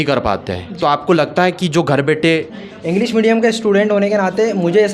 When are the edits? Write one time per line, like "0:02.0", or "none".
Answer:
0:02.6